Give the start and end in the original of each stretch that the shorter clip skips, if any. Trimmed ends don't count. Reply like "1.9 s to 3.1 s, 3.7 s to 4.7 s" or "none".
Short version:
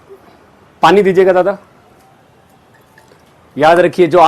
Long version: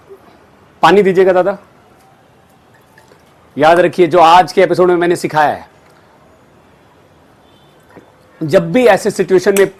none